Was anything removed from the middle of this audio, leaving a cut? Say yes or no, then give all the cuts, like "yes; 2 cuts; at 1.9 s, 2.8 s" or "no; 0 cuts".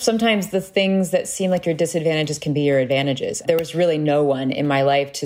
yes; 1 cut; at 3.3 s